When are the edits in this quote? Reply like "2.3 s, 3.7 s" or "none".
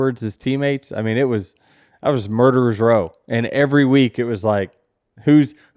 none